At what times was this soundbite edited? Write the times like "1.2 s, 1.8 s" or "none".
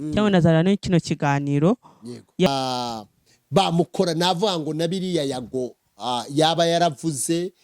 2.5 s

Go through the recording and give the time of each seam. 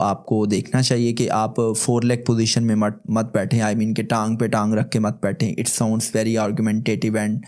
none

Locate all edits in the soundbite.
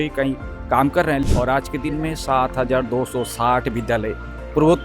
1.2 s

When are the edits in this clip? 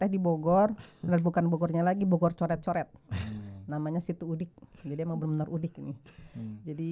none

